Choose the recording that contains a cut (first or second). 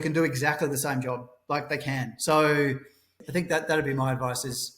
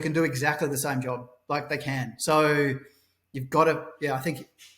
first